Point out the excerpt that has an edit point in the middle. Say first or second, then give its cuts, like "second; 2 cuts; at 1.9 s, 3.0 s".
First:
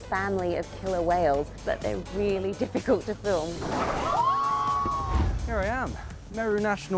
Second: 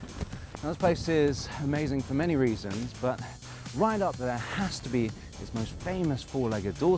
first; 3 cuts; at 1.5 s, 3.5 s, 5.1 s